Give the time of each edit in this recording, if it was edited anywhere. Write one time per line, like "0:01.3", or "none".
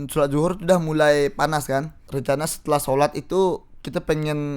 0:02.1

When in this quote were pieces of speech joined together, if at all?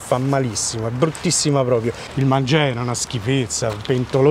0:02.0

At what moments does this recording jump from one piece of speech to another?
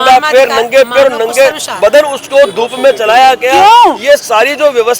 none

